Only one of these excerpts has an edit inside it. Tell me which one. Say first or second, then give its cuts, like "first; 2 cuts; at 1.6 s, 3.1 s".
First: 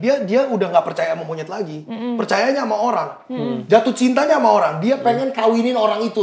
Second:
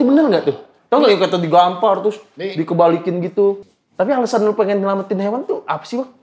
second; 1 cut; at 3.7 s